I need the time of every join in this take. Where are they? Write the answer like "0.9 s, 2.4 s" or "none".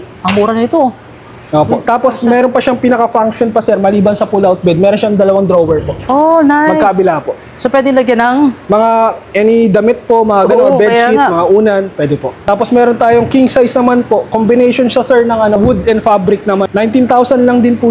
12.4 s, 15.6 s, 16.7 s